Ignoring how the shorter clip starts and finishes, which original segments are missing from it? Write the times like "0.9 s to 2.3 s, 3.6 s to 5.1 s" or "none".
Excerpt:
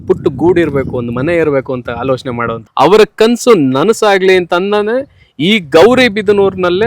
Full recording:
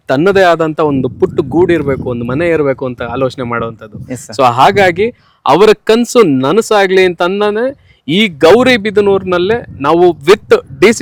3.7 s to 5.3 s